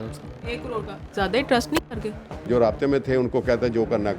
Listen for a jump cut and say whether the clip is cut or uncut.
cut